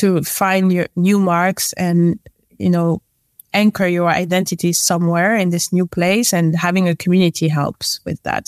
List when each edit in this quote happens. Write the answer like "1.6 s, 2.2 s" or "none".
none